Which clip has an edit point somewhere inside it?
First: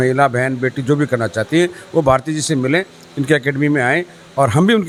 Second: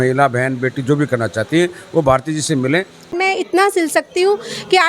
second; 1 cut; at 3.1 s

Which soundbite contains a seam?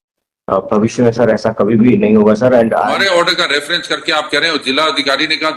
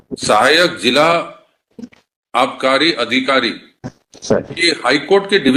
first; 1 cut; at 2.9 s

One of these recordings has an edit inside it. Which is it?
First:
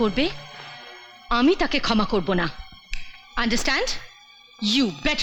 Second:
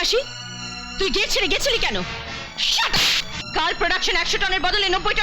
second; 2 cuts; at 2.5 s, 3.3 s

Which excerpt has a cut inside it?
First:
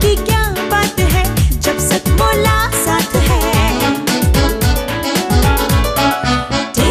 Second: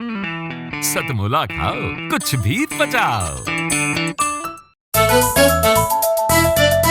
second; 1 cut; at 4.8 s

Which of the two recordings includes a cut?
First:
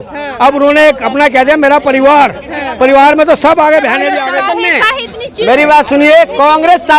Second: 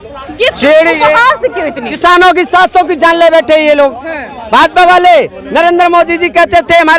first; 1 cut; at 4.2 s

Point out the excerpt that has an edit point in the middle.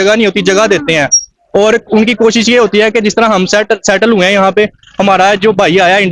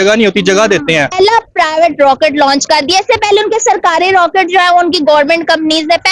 second; 1 cut; at 1.1 s

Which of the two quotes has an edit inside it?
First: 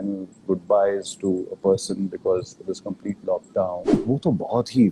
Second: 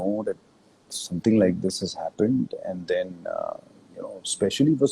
first; 1 cut; at 3.9 s

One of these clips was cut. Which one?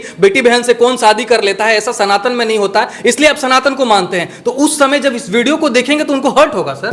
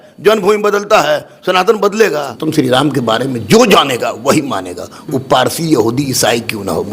second; 1 cut; at 2.3 s

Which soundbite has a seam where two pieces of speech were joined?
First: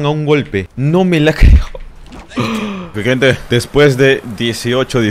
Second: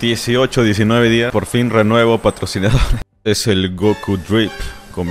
first; 1 cut; at 2.9 s

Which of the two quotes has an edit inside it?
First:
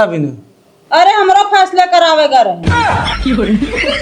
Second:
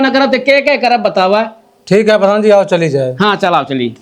first; 1 cut; at 2.6 s

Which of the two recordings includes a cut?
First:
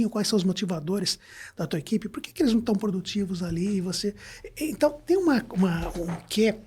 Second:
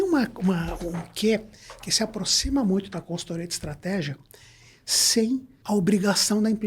second; 1 cut; at 5.5 s

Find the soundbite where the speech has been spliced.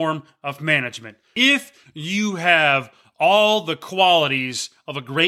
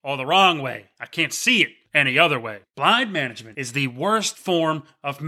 second; 1 cut; at 2.6 s

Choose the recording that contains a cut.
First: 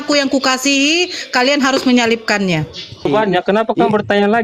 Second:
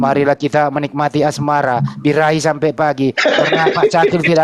first; 1 cut; at 3.1 s

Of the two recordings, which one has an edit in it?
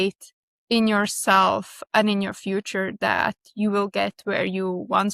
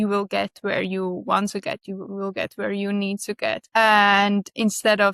second; 1 cut; at 3.6 s

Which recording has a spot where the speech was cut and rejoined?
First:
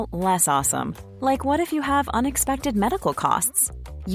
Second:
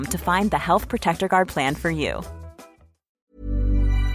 second; 1 cut; at 3.1 s

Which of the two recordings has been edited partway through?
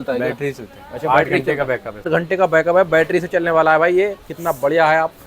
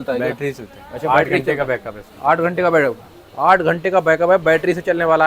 first; 1 cut; at 2.1 s

